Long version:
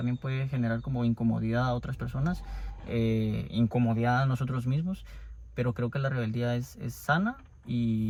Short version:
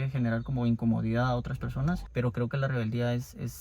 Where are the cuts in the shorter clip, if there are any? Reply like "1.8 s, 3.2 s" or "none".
2.1 s